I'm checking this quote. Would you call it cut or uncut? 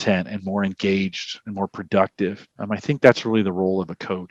cut